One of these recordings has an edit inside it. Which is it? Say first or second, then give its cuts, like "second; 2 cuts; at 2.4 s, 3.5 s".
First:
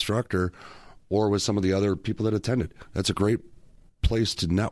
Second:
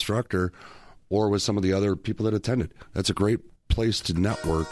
second; 1 cut; at 3.6 s